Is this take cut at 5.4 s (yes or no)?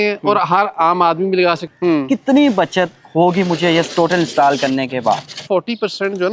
yes